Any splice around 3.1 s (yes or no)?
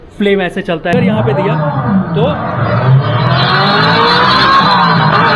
no